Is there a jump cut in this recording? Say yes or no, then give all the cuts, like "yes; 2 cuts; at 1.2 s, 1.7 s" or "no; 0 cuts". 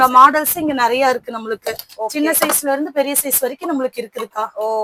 no; 0 cuts